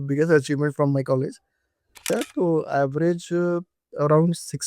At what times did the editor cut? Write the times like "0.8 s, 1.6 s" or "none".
2.1 s